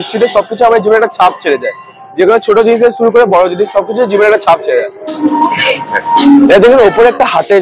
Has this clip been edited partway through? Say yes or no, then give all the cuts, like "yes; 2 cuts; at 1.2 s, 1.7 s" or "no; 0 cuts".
yes; 1 cut; at 5.1 s